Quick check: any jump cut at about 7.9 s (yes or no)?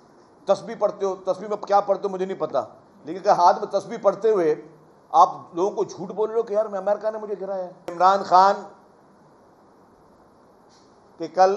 yes